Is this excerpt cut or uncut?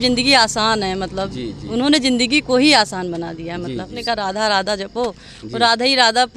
cut